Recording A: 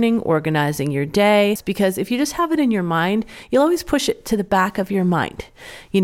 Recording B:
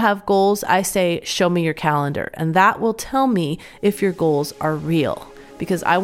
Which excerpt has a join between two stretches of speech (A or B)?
A